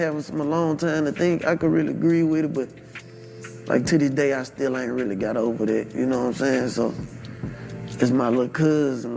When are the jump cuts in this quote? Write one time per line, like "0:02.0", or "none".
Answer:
none